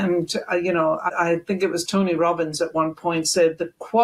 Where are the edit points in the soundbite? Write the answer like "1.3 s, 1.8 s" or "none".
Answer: 1.1 s